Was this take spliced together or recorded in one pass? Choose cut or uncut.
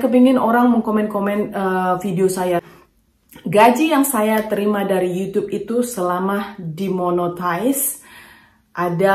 cut